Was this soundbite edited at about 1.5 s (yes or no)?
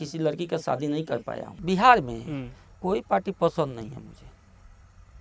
yes